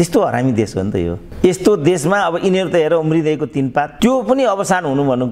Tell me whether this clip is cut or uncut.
cut